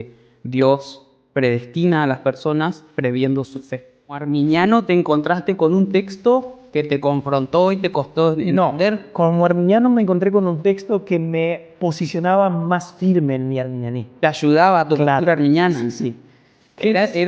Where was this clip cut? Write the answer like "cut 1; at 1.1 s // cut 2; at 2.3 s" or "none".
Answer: cut 1; at 4.2 s